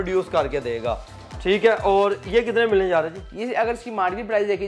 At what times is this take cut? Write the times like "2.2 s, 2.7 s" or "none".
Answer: none